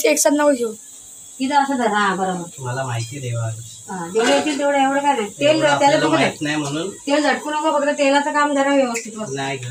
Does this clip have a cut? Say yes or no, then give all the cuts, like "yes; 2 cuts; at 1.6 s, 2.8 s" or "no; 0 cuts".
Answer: no; 0 cuts